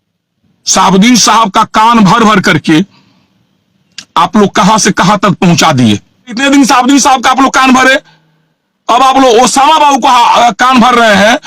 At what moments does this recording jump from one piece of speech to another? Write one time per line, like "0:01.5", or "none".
0:06.4